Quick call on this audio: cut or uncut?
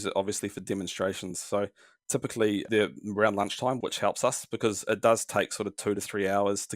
cut